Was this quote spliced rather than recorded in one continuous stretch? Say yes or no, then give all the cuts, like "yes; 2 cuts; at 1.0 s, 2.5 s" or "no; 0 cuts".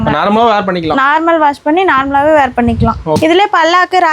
yes; 1 cut; at 3.2 s